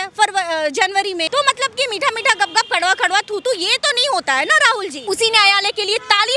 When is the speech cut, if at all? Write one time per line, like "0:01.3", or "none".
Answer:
0:01.2
0:05.0